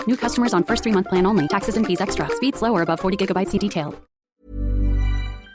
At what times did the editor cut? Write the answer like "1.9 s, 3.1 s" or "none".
4.1 s